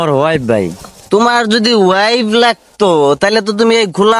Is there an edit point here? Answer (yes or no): no